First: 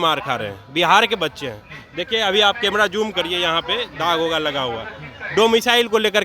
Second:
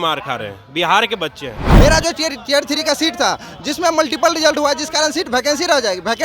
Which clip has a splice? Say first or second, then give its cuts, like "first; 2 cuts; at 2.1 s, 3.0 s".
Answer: second; 1 cut; at 1.6 s